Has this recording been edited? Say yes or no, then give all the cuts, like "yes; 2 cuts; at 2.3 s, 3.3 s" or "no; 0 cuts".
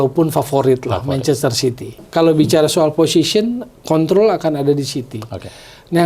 yes; 1 cut; at 2.0 s